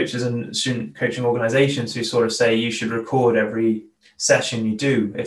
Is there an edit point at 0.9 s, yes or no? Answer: no